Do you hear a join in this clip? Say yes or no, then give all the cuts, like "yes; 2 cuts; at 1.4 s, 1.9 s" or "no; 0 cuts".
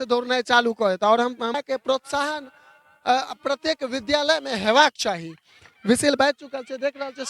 yes; 1 cut; at 1.6 s